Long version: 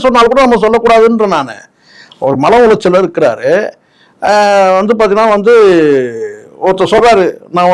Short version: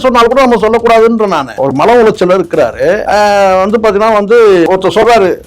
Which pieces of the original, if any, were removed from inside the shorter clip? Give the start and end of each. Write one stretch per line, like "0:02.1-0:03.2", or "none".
0:01.5-0:02.1
0:03.7-0:04.2
0:05.8-0:06.6